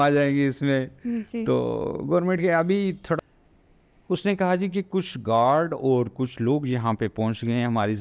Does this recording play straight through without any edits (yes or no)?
no